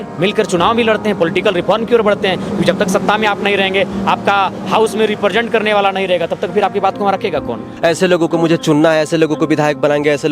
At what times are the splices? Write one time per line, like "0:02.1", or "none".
0:07.7